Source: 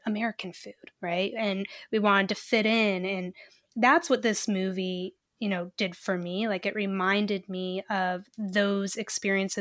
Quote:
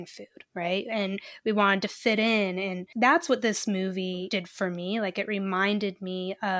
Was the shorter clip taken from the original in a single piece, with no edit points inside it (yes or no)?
no